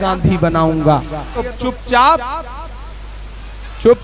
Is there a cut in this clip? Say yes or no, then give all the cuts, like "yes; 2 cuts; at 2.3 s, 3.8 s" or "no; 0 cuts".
yes; 1 cut; at 1.3 s